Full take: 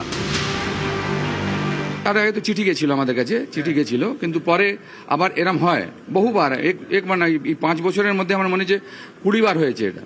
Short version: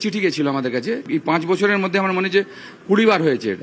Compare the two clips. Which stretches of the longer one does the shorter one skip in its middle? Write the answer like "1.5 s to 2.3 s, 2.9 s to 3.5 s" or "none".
3.5 s to 7.4 s